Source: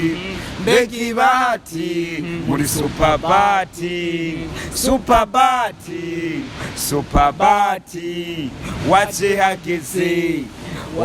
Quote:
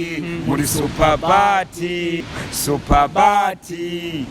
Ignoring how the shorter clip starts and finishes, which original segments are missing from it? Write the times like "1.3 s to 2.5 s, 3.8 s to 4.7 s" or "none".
4.3 s to 6.5 s